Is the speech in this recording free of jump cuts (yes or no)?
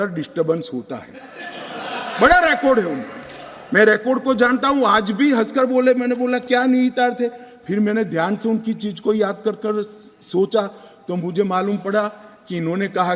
yes